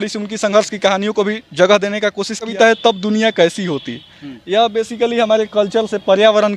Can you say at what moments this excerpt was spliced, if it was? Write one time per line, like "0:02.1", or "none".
0:02.5